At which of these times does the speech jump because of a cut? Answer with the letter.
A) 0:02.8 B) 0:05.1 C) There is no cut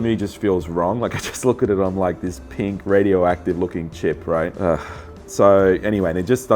C